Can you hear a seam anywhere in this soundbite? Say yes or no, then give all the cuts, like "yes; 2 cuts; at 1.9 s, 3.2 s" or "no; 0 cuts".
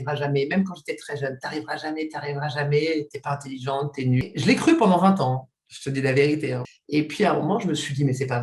yes; 2 cuts; at 4.2 s, 6.7 s